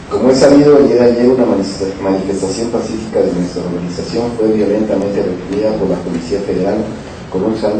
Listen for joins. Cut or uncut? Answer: cut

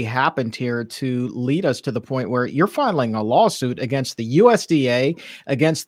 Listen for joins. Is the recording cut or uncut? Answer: uncut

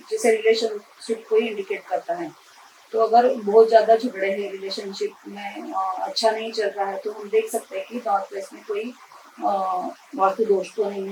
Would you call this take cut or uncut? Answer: uncut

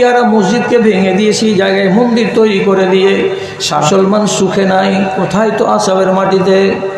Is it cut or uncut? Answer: cut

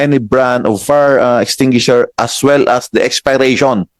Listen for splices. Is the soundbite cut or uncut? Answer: uncut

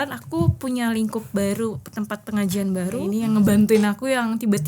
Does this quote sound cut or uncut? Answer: cut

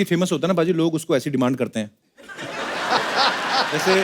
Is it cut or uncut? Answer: uncut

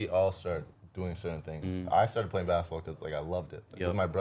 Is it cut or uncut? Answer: uncut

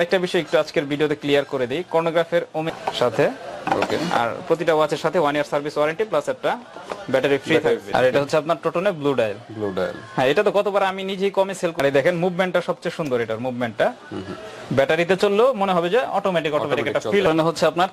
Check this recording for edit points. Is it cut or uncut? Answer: cut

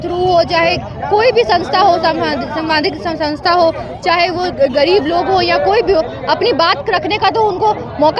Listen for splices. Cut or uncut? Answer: uncut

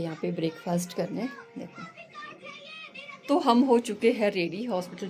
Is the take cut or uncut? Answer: cut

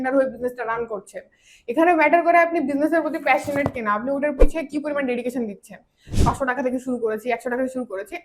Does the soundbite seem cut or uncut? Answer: cut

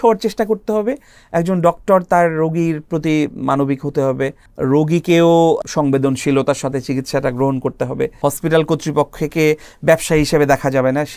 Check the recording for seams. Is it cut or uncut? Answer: cut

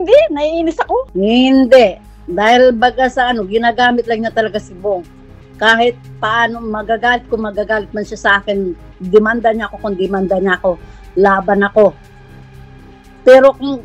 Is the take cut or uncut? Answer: cut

